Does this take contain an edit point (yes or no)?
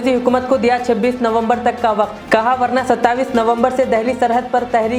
no